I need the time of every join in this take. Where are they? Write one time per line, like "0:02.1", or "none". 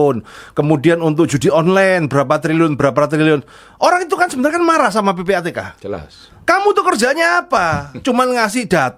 none